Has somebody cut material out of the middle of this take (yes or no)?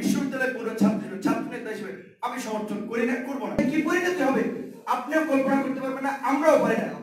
yes